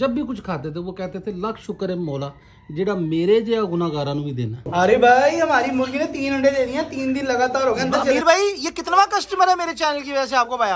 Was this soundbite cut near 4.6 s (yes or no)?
yes